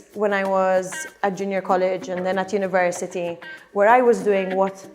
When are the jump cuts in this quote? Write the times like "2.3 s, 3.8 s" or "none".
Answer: 1.0 s